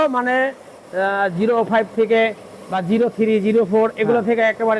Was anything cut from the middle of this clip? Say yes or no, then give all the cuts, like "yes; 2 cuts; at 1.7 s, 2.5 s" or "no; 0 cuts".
no; 0 cuts